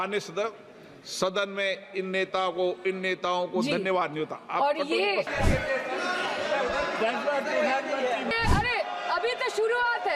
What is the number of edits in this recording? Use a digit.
2